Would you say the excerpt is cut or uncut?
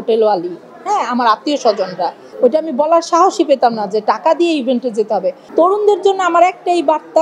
cut